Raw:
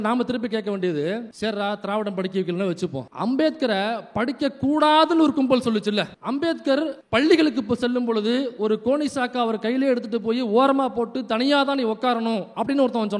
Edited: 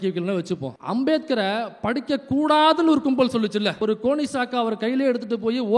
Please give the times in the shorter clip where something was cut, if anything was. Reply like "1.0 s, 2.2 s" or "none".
3.8 s